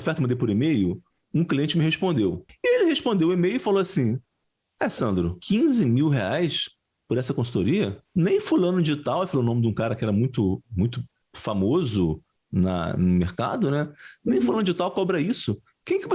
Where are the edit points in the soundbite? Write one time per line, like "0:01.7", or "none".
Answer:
0:02.5
0:05.4
0:08.0